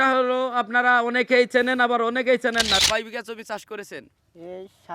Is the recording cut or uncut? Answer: cut